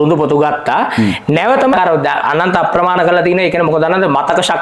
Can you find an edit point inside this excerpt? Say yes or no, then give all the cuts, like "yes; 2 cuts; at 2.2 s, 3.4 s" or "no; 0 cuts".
yes; 1 cut; at 1.7 s